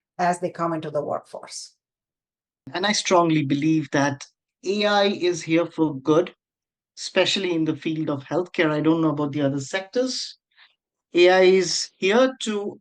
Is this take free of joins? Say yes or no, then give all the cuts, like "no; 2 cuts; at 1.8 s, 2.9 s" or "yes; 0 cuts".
no; 1 cut; at 2.7 s